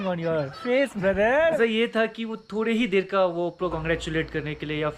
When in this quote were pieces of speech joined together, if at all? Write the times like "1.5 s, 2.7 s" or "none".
1.6 s, 3.7 s